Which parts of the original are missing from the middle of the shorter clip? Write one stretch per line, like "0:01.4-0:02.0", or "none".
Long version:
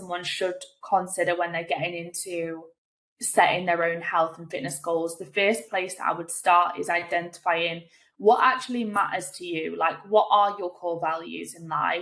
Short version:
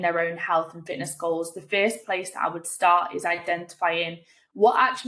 none